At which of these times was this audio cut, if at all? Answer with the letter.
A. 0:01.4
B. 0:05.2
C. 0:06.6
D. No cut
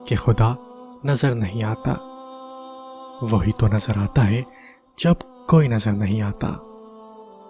C